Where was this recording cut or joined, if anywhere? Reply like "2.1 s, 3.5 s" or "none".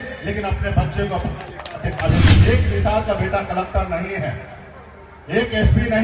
2.3 s